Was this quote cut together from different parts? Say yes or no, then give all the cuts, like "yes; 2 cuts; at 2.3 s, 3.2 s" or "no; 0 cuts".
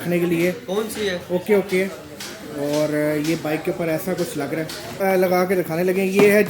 yes; 1 cut; at 4.8 s